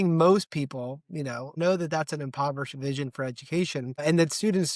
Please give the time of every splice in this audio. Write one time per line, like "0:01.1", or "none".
0:01.5
0:04.0